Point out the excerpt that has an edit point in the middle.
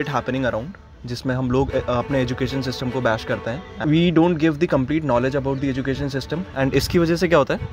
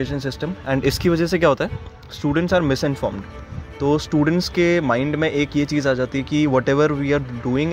first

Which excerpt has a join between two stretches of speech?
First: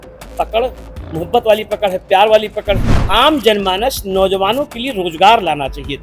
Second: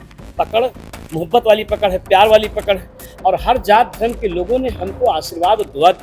first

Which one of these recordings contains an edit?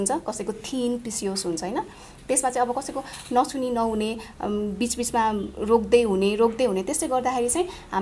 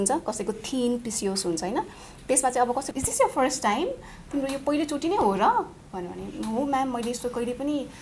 second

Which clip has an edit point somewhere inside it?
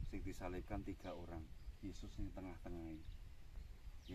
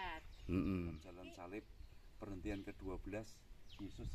second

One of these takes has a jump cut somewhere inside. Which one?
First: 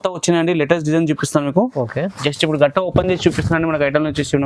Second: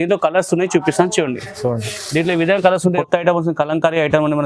second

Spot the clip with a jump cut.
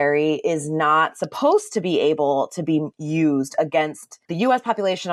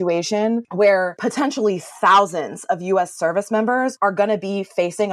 second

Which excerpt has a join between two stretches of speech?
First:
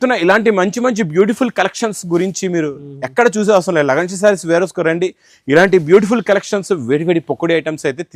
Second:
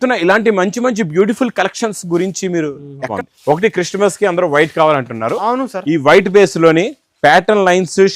second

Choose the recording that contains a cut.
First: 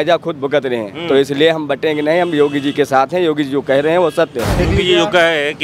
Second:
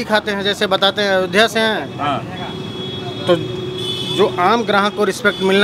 first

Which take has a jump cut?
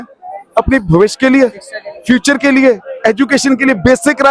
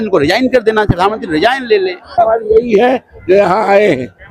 second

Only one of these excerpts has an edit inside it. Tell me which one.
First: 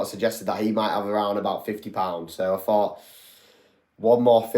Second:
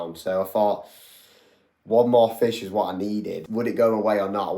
second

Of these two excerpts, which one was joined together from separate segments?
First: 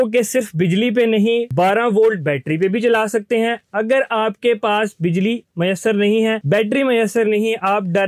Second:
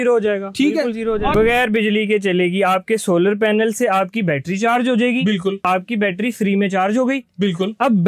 second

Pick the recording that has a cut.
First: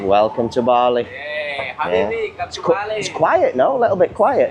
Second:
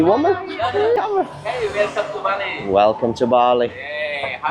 second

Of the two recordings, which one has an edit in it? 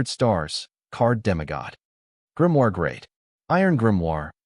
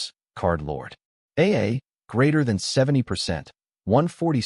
first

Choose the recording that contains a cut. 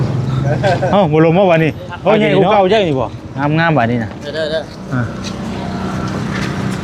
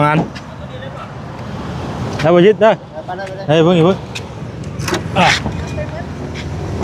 first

